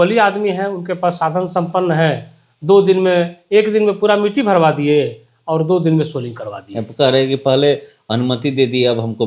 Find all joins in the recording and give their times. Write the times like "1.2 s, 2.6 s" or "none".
none